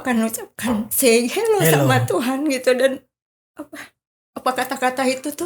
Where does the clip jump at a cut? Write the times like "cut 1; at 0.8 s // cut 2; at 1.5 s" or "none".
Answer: none